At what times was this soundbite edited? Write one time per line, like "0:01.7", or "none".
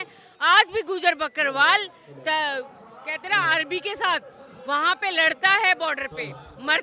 none